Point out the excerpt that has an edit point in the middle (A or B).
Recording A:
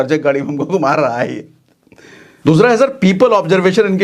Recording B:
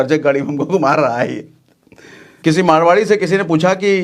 B